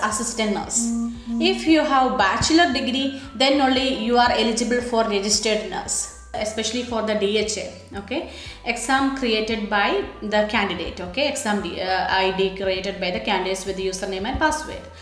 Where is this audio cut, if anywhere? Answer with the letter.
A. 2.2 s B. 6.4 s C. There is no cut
B